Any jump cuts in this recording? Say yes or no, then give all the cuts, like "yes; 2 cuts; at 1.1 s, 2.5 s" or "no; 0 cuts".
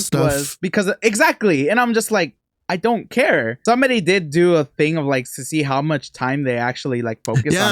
yes; 1 cut; at 3.5 s